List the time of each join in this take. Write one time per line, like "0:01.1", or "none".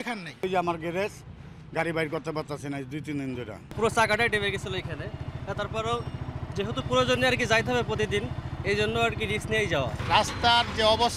0:10.0